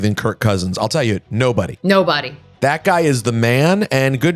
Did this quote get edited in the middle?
no; 0 cuts

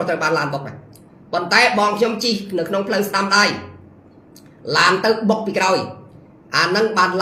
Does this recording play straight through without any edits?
yes; 0 cuts

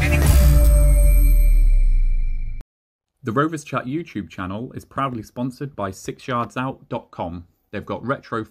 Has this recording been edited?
yes; 1 cut; at 3.1 s

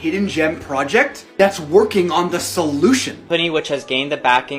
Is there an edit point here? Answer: yes; 1 cut; at 3.2 s

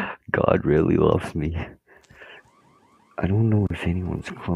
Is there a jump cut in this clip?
yes; 1 cut; at 2.4 s

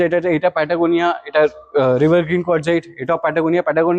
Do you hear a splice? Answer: no; 0 cuts

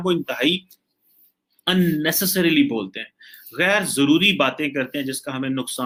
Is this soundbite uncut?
yes; 0 cuts

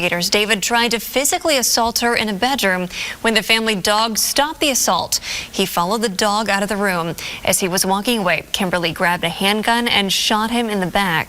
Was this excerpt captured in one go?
no; 2 cuts; at 3.0 s, 5.1 s

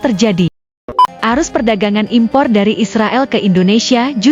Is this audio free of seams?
no; 1 cut; at 0.9 s

